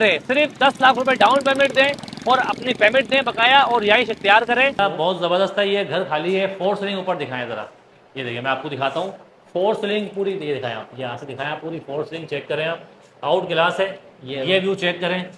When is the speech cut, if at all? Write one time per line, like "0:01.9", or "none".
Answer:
0:04.8

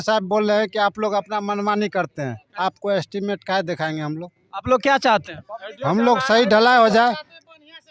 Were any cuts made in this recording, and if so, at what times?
0:02.4

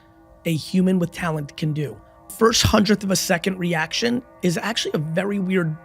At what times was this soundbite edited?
0:02.3

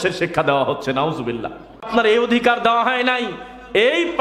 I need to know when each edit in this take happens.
0:01.9

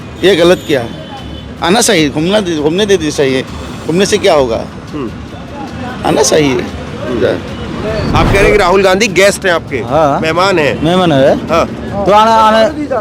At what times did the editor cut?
0:08.1

